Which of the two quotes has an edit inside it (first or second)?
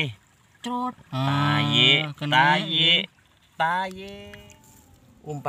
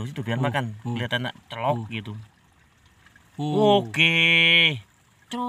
first